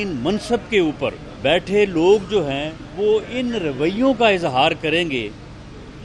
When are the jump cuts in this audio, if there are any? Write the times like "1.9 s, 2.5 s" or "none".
1.3 s, 2.8 s